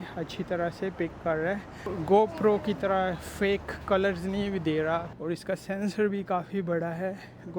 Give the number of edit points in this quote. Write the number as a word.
two